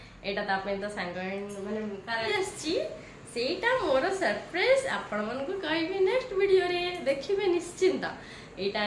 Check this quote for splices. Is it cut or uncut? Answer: cut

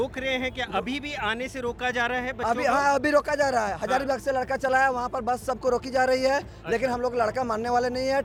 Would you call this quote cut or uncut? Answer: uncut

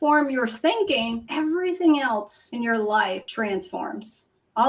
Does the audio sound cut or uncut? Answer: cut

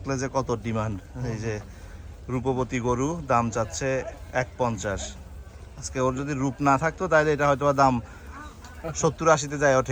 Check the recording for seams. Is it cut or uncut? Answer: uncut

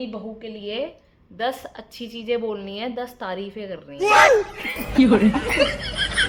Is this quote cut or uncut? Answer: uncut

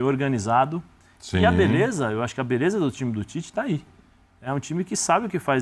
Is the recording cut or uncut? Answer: uncut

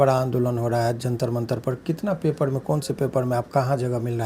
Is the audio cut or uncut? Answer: uncut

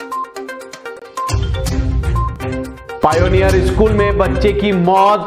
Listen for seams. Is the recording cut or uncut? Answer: cut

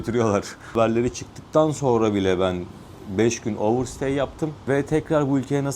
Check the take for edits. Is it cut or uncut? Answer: cut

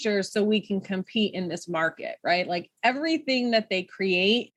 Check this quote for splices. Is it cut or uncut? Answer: uncut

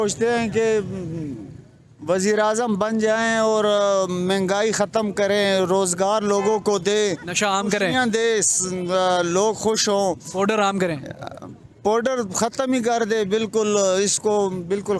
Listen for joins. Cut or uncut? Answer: uncut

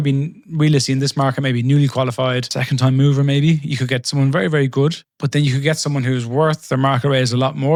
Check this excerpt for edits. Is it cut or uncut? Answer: uncut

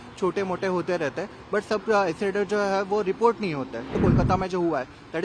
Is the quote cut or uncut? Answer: cut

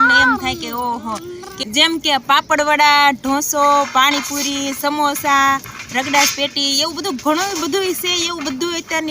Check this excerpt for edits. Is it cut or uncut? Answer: cut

